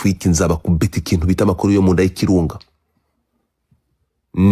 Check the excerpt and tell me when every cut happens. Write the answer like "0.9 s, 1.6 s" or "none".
none